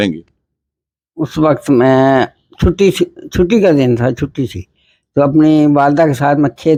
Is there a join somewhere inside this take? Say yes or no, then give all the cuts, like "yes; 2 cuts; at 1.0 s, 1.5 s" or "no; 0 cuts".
no; 0 cuts